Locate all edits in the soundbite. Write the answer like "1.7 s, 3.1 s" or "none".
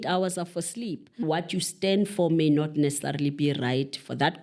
1.2 s